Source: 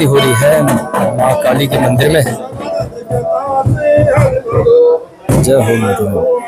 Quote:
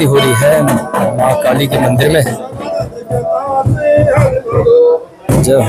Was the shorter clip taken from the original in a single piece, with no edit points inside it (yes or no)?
yes